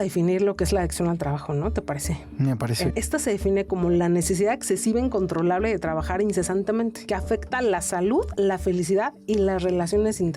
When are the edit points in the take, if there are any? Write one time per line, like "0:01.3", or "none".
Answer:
0:02.9